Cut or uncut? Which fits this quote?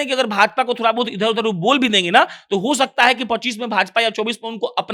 uncut